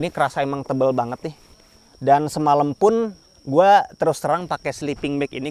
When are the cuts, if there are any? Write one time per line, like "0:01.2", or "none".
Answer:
none